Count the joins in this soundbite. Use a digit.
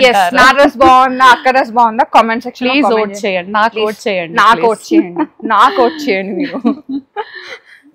0